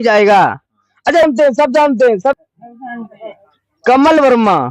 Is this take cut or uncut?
uncut